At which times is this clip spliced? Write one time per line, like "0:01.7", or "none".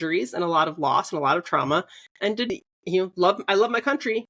0:02.5